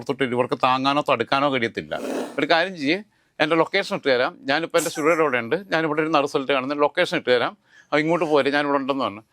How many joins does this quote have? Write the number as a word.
one